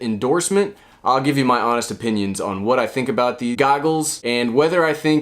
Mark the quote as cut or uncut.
cut